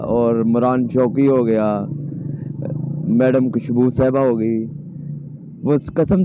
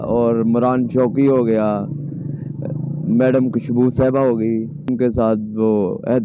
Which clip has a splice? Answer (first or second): second